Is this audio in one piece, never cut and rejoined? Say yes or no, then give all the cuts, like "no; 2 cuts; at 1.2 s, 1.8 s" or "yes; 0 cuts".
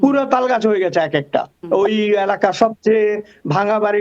no; 1 cut; at 1.6 s